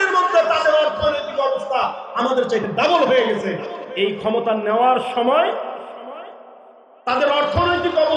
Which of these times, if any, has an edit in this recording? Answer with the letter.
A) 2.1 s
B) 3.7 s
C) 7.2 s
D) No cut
B